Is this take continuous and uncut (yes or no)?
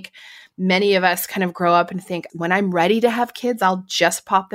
no